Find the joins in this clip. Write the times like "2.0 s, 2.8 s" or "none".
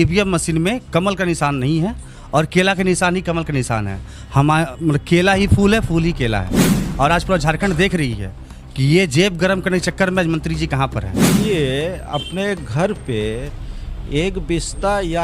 6.8 s, 11.3 s